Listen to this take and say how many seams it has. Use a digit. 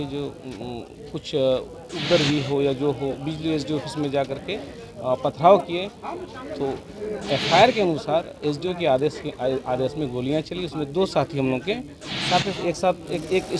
0